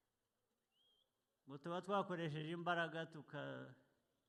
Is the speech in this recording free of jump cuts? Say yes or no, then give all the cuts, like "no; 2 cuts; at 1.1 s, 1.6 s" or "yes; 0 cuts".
yes; 0 cuts